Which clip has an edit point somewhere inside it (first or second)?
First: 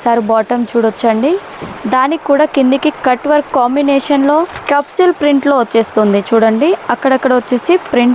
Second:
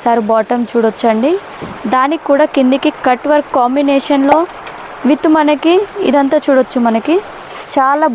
first